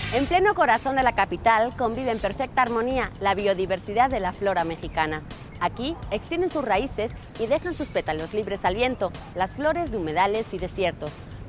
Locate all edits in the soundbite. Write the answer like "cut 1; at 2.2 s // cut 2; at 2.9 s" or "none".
cut 1; at 3.9 s